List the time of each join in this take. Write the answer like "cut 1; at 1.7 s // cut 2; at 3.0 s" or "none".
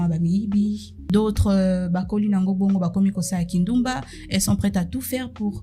cut 1; at 0.9 s